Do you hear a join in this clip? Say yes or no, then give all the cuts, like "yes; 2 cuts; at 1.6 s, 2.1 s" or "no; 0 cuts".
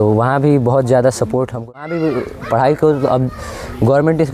yes; 1 cut; at 1.6 s